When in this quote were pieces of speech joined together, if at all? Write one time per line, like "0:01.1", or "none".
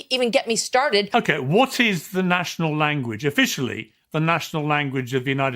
0:01.1